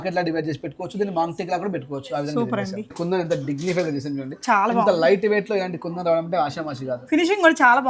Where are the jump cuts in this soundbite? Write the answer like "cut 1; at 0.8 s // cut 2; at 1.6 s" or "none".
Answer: cut 1; at 3.0 s